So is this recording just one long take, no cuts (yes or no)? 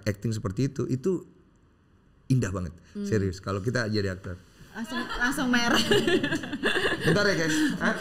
yes